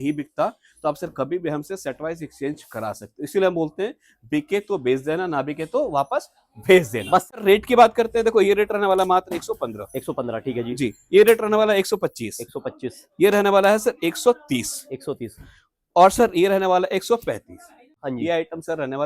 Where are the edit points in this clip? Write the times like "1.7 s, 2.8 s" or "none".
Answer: 7.4 s, 18.0 s